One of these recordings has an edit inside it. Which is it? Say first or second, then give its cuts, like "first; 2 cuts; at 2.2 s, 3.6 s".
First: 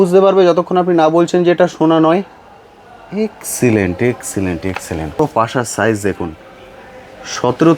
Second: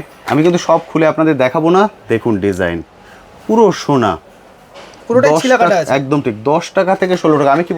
first; 1 cut; at 5.2 s